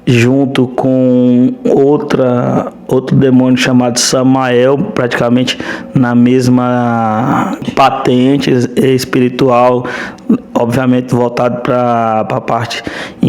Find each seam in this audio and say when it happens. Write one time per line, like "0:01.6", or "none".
0:07.7

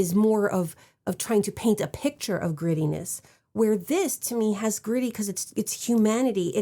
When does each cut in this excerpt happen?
none

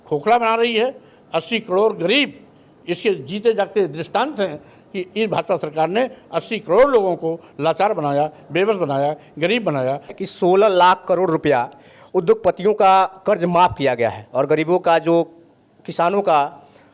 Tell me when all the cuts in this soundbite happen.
0:10.1

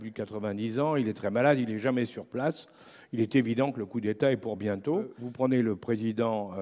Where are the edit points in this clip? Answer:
0:05.1

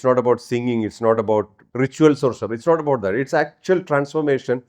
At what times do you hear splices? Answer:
0:01.6

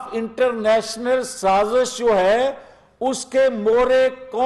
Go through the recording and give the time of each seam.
none

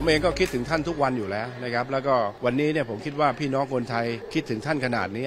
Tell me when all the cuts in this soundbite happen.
0:02.3
0:04.2

